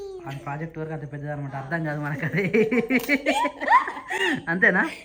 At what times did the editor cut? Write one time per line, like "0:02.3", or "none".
none